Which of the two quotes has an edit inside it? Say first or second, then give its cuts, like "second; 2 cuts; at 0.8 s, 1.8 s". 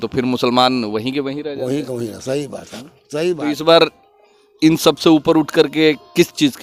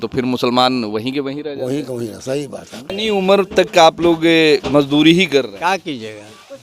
second; 1 cut; at 2.8 s